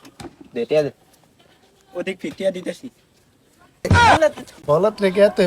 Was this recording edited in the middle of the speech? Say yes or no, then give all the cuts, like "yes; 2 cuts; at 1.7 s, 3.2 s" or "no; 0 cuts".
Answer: yes; 1 cut; at 4.5 s